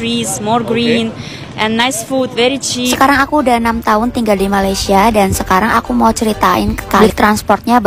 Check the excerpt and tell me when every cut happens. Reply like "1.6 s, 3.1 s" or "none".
2.9 s, 7.0 s